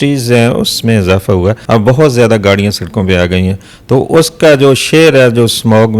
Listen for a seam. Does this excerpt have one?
yes; 1 cut; at 1.6 s

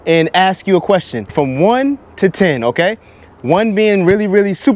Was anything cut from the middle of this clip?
no; 0 cuts

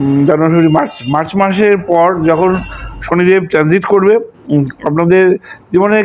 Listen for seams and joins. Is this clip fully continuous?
yes; 0 cuts

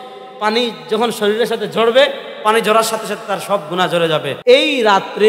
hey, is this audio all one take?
no; 1 cut; at 4.4 s

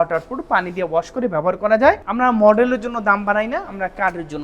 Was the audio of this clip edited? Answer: yes; 1 cut; at 2.0 s

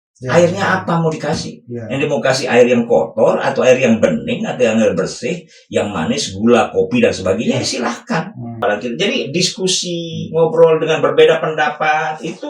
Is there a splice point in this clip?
yes; 1 cut; at 8.6 s

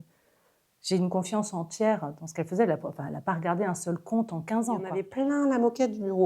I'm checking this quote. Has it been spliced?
yes; 1 cut; at 5.1 s

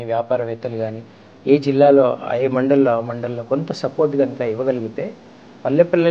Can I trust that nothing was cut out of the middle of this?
yes; 0 cuts

